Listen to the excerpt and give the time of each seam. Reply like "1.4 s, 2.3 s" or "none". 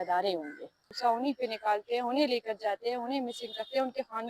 0.9 s